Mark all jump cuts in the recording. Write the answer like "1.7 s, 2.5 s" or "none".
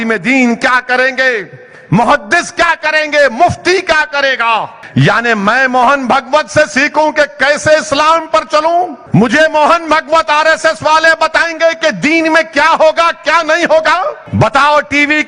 4.8 s, 9.0 s, 14.2 s